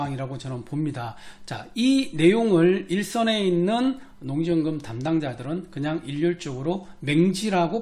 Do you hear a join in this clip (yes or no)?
no